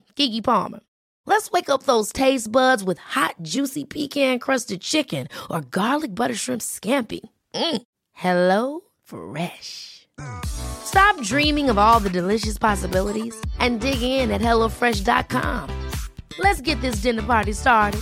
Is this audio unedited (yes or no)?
yes